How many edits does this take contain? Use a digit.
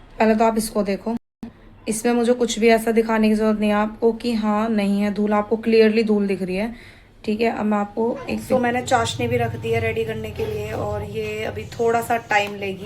1